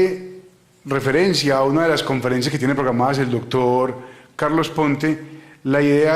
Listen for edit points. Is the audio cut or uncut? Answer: uncut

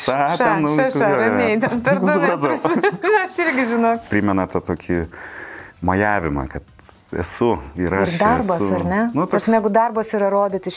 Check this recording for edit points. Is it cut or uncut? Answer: cut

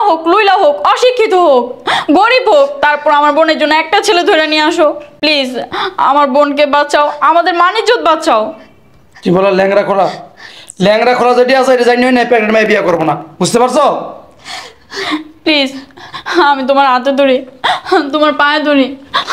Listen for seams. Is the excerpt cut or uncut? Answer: uncut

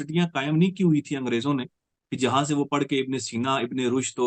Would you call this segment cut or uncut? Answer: uncut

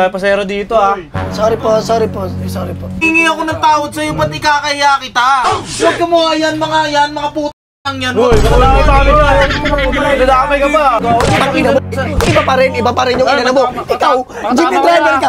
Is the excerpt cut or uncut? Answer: cut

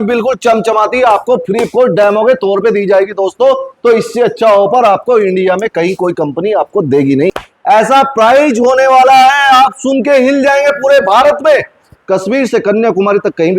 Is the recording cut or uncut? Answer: cut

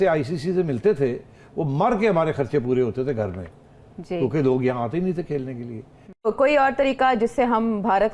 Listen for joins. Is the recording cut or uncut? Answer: cut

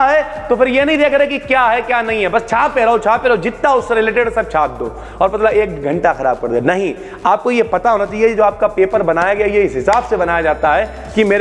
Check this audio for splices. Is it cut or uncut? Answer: uncut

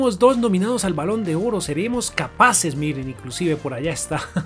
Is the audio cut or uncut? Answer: uncut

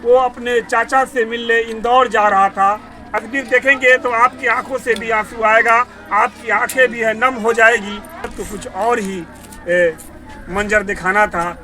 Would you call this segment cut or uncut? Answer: cut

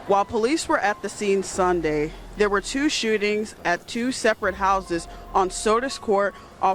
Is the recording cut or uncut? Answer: uncut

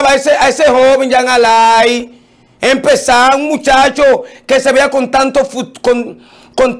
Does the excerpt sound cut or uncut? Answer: uncut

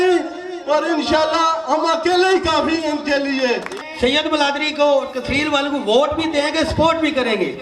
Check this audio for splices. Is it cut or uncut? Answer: cut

